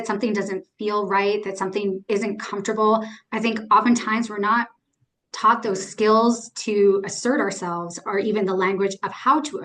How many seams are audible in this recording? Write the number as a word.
zero